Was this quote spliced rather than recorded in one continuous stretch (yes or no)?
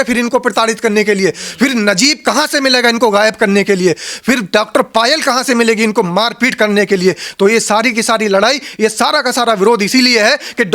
no